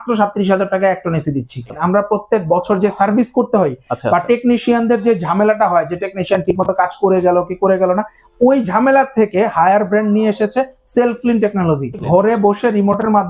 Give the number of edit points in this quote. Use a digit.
2